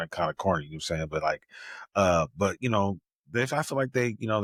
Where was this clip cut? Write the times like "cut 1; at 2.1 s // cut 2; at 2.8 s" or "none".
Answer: none